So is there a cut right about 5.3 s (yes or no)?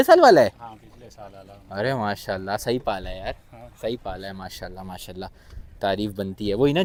no